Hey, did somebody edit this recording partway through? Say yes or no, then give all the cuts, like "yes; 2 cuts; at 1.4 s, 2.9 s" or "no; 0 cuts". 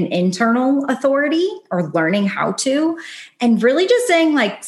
no; 0 cuts